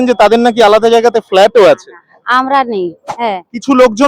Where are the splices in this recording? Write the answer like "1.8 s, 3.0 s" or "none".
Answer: 3.1 s